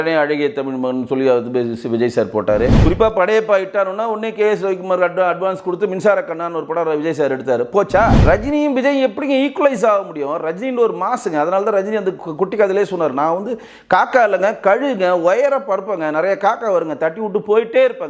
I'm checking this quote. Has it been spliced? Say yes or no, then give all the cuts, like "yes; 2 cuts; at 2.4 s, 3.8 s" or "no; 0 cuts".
yes; 2 cuts; at 2.8 s, 8.2 s